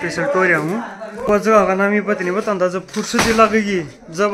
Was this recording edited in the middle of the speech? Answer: yes; 1 cut; at 1.3 s

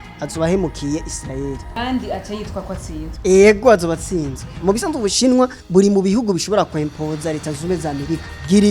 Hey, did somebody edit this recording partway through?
yes; 2 cuts; at 4.5 s, 5.6 s

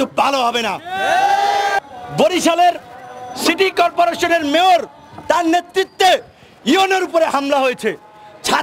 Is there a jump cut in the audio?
yes; 1 cut; at 1.8 s

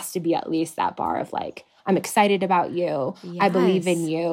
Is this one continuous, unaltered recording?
yes; 0 cuts

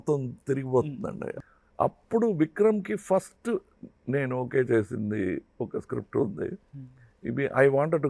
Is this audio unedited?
no; 1 cut; at 1.3 s

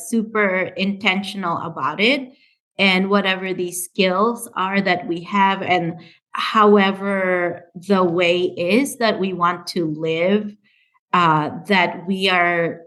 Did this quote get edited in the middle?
no; 0 cuts

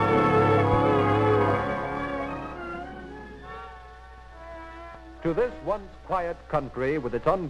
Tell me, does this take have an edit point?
yes; 1 cut; at 2.7 s

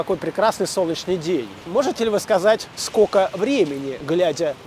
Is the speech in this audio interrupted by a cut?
yes; 2 cuts; at 1.5 s, 2.8 s

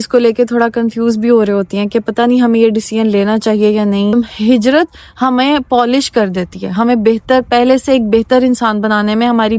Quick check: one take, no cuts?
no; 1 cut; at 4.1 s

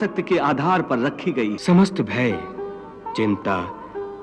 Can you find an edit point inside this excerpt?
yes; 1 cut; at 1.6 s

